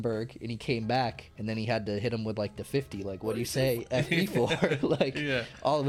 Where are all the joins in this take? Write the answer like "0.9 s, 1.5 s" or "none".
1.3 s